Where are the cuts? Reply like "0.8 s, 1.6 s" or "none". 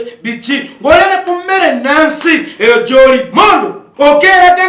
3.8 s